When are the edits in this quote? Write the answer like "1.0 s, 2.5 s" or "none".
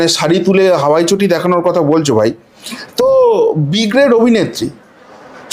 none